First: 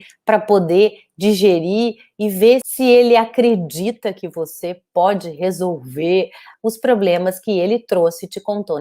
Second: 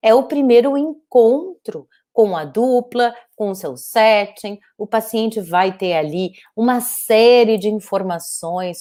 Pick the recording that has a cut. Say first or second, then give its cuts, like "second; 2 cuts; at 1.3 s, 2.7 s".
first; 2 cuts; at 2.6 s, 6.4 s